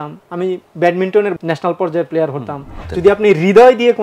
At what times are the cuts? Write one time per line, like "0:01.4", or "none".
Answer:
0:01.4
0:02.8